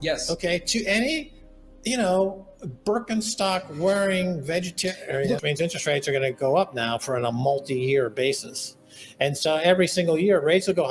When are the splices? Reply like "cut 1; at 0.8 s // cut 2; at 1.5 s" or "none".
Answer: cut 1; at 5.4 s

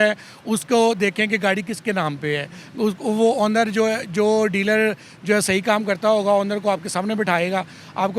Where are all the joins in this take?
none

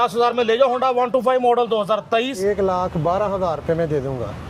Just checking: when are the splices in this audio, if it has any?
cut 1; at 2.4 s

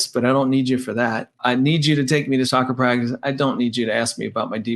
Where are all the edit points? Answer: cut 1; at 1.4 s // cut 2; at 2.5 s

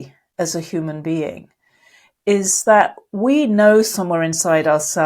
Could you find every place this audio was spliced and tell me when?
none

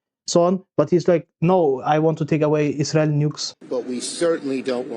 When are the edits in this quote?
cut 1; at 3.5 s

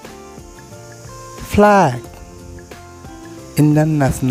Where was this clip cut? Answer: none

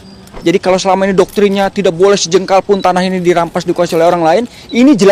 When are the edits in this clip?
none

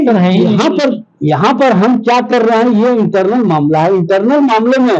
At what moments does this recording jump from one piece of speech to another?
none

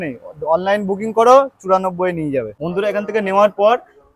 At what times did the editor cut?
cut 1; at 2.6 s

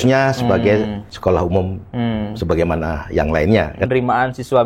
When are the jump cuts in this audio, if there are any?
cut 1; at 1.0 s // cut 2; at 3.9 s

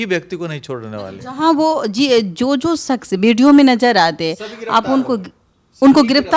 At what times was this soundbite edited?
none

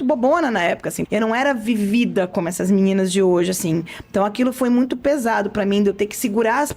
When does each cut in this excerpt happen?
cut 1; at 1.0 s

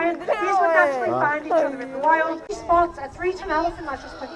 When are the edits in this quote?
cut 1; at 2.6 s

